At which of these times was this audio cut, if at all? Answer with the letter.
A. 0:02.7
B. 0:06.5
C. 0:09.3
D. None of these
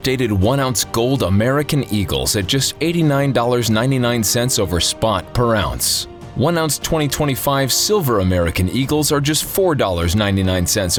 D